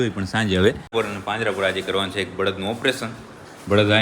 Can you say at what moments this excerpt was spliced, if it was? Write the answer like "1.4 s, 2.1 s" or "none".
0.9 s